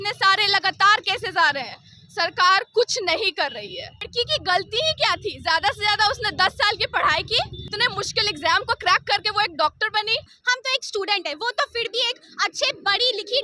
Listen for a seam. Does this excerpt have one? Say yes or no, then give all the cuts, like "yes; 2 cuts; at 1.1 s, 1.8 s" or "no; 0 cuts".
yes; 3 cuts; at 4.1 s, 7.6 s, 10.4 s